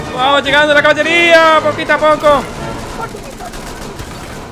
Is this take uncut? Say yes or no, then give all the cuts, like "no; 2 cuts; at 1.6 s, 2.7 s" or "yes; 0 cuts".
no; 1 cut; at 2.8 s